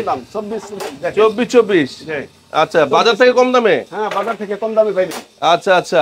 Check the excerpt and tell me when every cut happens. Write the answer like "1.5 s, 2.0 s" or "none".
none